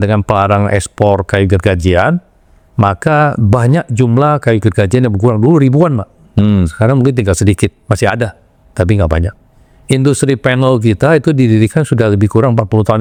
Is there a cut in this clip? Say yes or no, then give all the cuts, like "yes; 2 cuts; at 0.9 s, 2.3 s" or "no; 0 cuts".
no; 0 cuts